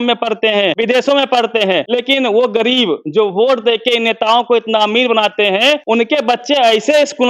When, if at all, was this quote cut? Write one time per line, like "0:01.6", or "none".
0:00.8
0:01.9
0:05.8